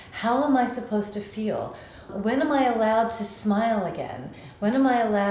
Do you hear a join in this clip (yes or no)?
yes